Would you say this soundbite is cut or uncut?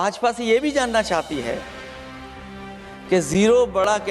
uncut